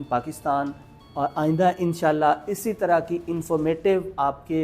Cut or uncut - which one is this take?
uncut